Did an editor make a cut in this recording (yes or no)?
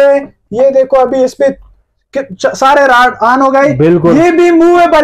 no